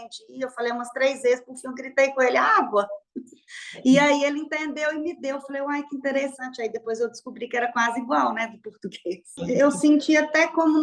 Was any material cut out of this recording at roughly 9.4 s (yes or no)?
yes